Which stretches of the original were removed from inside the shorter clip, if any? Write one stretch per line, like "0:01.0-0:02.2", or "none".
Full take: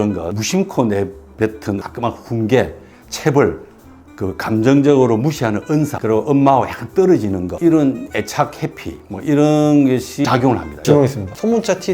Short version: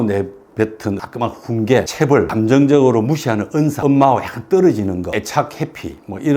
0:03.1-0:04.4
0:05.9-0:06.2
0:07.5-0:08.1